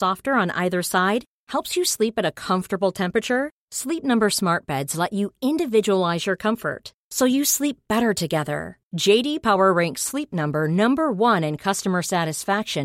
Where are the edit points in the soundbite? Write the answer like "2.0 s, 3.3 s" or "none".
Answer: none